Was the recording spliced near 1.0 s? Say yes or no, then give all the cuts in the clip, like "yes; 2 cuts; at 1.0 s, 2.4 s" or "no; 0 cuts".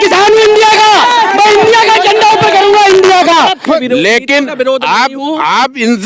no; 1 cut; at 3.8 s